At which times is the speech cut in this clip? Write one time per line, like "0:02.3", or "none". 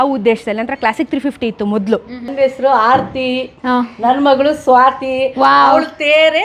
0:02.3